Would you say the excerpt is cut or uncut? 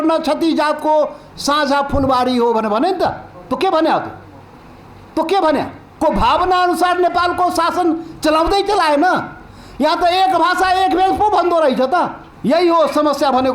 cut